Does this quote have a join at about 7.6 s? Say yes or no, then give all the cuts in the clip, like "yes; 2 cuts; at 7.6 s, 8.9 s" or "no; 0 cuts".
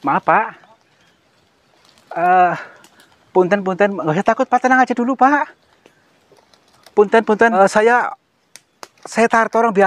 yes; 1 cut; at 7.6 s